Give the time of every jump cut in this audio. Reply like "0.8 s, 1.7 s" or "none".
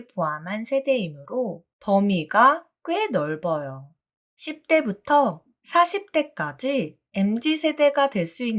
1.6 s